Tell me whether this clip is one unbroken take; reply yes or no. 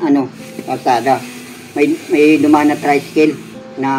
yes